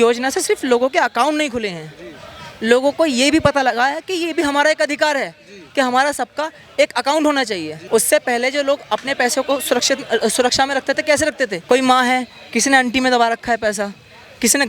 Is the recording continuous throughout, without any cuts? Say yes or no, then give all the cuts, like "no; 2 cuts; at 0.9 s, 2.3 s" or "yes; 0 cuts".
yes; 0 cuts